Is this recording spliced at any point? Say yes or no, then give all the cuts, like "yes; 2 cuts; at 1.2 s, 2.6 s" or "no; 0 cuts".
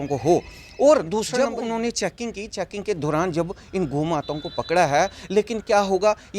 yes; 1 cut; at 1.3 s